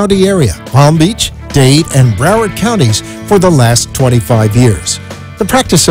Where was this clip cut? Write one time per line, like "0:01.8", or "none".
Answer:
none